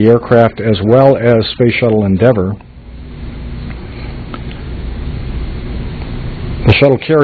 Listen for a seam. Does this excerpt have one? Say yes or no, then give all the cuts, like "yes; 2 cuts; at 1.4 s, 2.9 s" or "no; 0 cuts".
yes; 1 cut; at 2.6 s